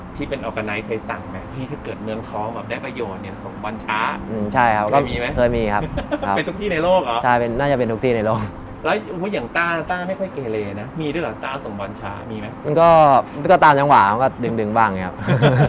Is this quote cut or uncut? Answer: uncut